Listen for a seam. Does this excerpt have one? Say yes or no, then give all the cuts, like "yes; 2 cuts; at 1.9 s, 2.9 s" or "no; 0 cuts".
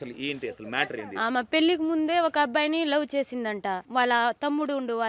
yes; 1 cut; at 3.8 s